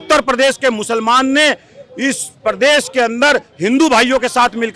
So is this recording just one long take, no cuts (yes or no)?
yes